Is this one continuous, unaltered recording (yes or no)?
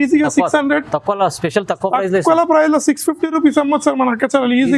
yes